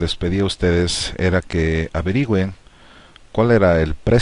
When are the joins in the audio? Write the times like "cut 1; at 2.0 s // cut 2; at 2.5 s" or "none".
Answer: cut 1; at 1.5 s